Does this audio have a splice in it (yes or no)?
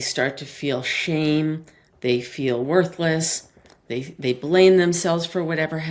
no